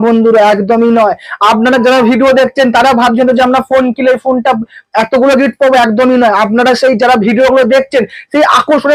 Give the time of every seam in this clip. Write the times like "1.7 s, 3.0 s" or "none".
none